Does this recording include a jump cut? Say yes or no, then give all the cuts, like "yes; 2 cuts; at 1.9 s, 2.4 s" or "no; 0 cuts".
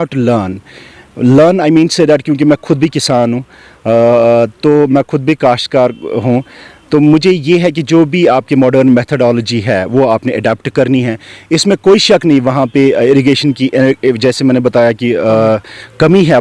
no; 0 cuts